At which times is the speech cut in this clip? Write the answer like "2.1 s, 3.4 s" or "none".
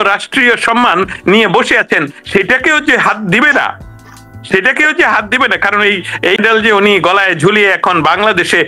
6.4 s